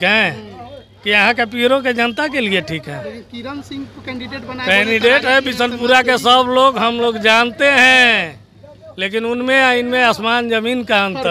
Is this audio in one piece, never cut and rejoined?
yes; 0 cuts

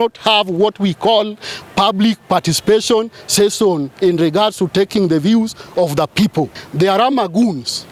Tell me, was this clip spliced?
yes; 1 cut; at 6.6 s

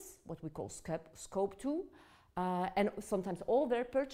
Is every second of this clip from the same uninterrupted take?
no; 1 cut; at 3.0 s

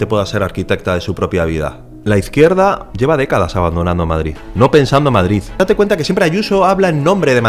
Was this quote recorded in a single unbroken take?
no; 4 cuts; at 1.9 s, 2.9 s, 4.4 s, 5.6 s

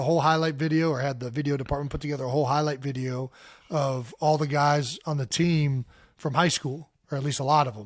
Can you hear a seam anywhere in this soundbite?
no; 0 cuts

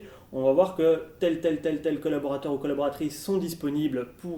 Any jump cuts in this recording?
no; 0 cuts

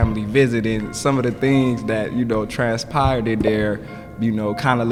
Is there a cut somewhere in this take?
no; 0 cuts

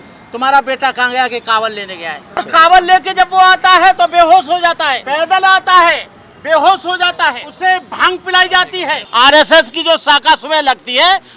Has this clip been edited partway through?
yes; 4 cuts; at 2.5 s, 5.0 s, 7.5 s, 9.0 s

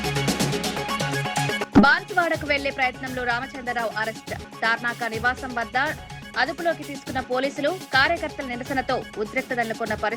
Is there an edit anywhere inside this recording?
yes; 1 cut; at 1.6 s

